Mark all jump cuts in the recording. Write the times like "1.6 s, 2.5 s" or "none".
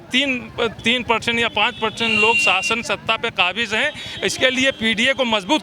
none